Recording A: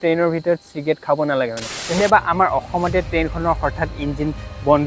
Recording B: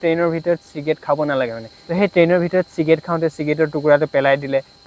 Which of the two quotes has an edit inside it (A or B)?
A